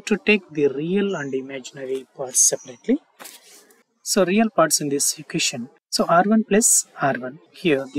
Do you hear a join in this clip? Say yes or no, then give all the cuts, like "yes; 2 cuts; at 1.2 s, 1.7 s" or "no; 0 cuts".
no; 0 cuts